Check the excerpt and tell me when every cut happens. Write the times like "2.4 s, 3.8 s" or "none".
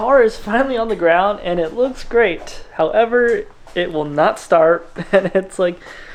none